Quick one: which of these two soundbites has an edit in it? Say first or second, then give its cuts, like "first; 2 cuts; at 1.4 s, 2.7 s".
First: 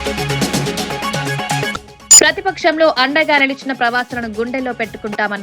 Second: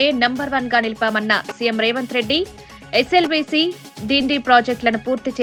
first; 1 cut; at 1.5 s